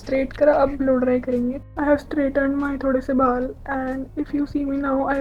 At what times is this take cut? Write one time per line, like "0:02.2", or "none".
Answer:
0:01.7